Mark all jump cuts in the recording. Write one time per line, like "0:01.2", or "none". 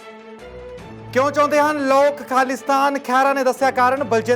0:01.0